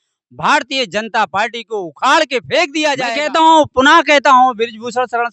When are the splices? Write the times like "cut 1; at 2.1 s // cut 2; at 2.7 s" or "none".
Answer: cut 1; at 3.2 s

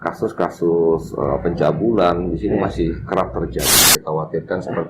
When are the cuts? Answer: cut 1; at 3.9 s

